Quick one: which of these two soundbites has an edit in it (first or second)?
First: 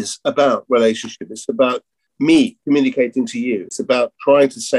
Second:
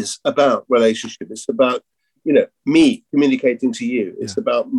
first